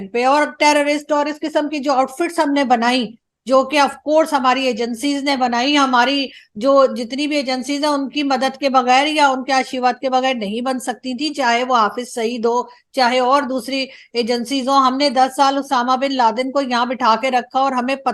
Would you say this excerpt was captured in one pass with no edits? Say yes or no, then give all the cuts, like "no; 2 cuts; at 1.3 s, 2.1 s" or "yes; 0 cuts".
yes; 0 cuts